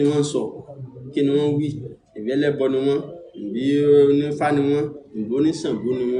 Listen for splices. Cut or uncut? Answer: uncut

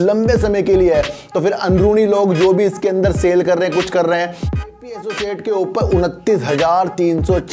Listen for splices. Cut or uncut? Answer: cut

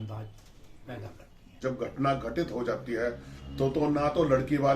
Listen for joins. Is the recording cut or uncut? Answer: cut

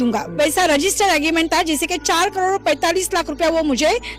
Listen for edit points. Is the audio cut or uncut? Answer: uncut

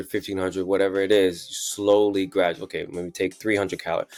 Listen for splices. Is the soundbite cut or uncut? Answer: uncut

